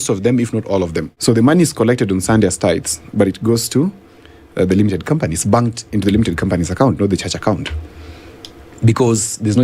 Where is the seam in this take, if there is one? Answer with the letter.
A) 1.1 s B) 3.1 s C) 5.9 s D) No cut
A